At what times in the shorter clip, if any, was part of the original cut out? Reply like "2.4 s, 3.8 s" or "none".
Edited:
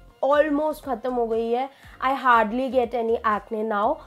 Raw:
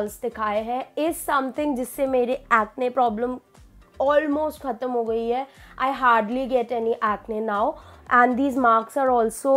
none